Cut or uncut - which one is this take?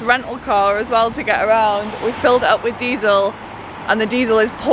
uncut